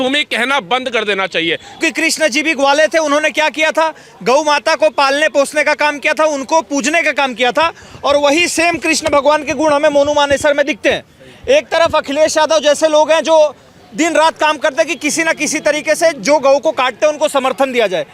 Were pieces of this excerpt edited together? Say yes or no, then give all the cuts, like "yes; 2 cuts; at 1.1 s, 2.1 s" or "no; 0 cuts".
yes; 1 cut; at 1.8 s